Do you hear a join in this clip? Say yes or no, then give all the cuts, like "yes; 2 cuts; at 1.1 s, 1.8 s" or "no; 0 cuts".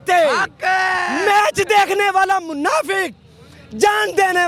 no; 0 cuts